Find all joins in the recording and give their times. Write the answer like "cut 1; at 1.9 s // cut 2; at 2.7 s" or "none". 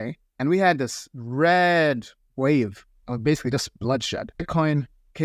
none